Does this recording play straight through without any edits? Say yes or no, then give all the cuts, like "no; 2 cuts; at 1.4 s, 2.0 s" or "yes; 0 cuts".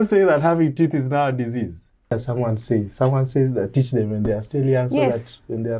no; 1 cut; at 2.1 s